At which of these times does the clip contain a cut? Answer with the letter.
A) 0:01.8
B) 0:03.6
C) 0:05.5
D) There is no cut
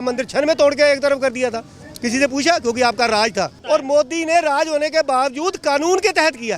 B